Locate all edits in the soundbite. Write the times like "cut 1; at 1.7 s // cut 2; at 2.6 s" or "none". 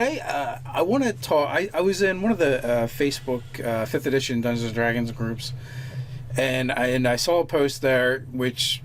cut 1; at 7.5 s